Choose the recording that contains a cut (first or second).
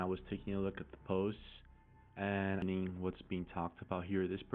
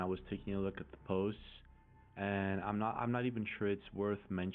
first